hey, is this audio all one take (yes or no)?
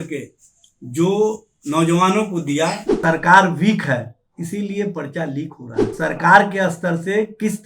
no